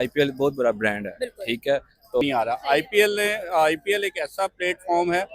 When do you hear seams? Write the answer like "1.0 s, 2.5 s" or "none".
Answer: 2.2 s